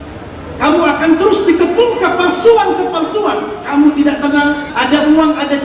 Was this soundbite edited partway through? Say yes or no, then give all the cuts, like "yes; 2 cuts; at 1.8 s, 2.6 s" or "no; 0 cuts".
no; 0 cuts